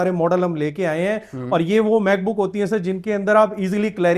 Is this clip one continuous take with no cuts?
yes; 0 cuts

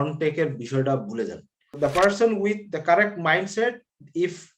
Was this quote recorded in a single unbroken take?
no; 1 cut; at 1.7 s

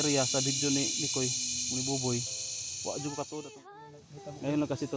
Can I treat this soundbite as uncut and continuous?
no; 1 cut; at 3.6 s

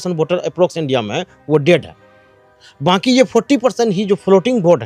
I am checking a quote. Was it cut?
no; 0 cuts

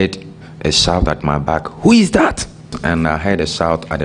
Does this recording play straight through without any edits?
no; 1 cut; at 2.7 s

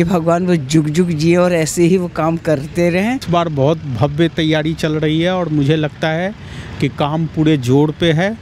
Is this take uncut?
no; 1 cut; at 3.2 s

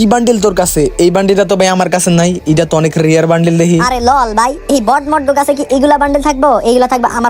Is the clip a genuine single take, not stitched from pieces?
yes; 0 cuts

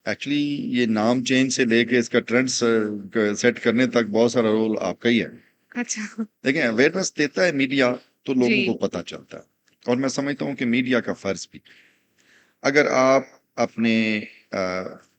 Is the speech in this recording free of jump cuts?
yes; 0 cuts

